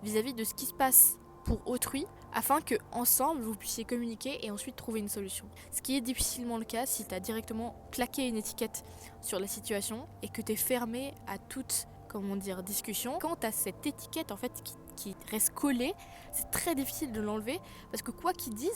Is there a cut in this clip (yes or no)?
yes